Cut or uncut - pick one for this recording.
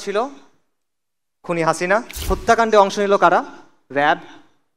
cut